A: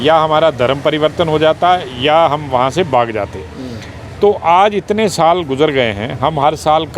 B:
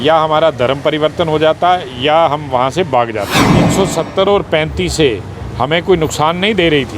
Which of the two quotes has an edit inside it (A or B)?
B